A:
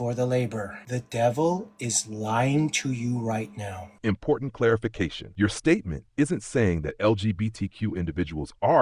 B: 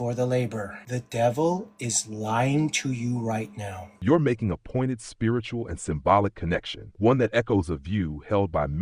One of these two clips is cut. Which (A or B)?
A